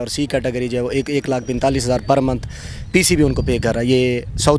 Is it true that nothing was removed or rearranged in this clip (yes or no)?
yes